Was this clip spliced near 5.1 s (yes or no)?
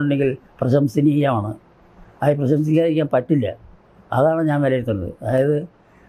no